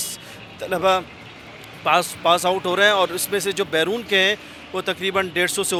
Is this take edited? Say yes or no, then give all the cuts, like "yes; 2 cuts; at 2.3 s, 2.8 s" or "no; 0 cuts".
no; 0 cuts